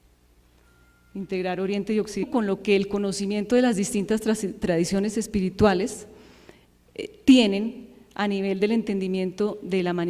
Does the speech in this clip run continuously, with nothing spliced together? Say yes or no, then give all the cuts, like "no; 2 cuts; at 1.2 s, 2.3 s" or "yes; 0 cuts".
yes; 0 cuts